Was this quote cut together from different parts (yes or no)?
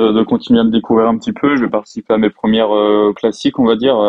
yes